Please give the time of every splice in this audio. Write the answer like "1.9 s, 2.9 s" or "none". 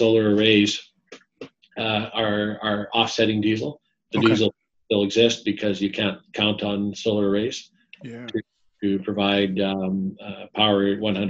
none